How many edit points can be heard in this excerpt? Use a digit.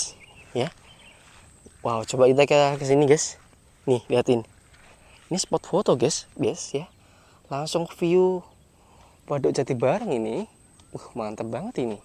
1